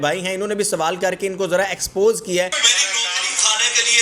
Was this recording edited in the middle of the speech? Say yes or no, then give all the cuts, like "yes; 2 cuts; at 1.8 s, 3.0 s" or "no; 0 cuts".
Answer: yes; 1 cut; at 2.6 s